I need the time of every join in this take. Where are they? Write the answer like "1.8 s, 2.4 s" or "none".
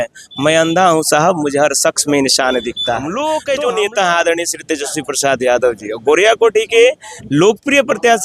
3.1 s